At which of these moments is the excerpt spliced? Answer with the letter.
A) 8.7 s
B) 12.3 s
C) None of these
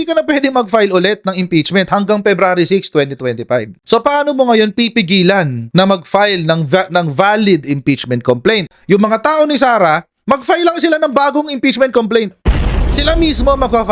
A